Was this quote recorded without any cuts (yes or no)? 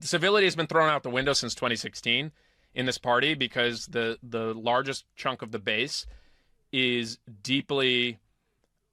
yes